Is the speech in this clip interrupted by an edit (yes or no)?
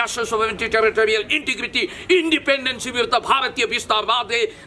no